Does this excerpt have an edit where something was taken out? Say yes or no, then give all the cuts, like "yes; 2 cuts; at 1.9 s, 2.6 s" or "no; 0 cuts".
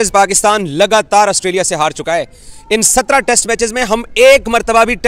no; 0 cuts